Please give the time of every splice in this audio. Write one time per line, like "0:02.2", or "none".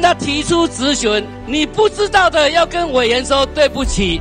0:01.4